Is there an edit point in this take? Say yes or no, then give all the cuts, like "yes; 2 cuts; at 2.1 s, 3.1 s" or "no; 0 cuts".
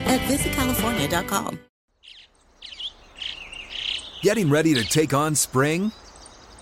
yes; 1 cut; at 1.7 s